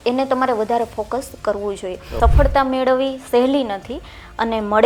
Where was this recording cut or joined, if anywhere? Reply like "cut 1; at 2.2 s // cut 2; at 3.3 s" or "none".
cut 1; at 2.1 s